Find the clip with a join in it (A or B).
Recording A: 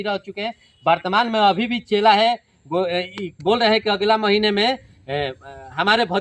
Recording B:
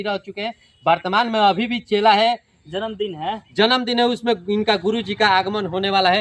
B